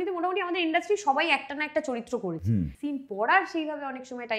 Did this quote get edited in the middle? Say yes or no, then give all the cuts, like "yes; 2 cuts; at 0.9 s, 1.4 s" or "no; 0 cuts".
yes; 1 cut; at 2.7 s